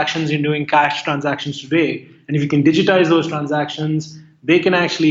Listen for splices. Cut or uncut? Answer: uncut